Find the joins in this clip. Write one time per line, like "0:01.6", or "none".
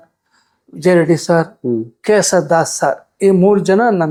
none